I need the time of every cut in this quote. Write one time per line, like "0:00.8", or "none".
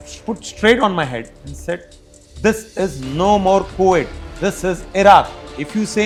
none